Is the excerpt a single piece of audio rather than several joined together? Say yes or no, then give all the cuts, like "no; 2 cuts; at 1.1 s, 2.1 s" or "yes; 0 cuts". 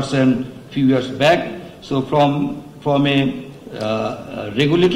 yes; 0 cuts